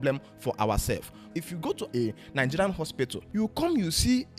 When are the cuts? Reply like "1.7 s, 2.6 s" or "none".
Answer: 1.4 s, 3.2 s